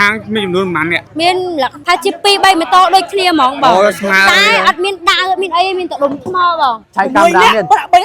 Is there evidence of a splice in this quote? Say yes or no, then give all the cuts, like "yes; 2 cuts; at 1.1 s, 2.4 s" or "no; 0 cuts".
yes; 3 cuts; at 1.0 s, 1.8 s, 6.9 s